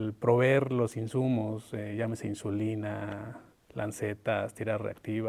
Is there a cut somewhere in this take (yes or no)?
no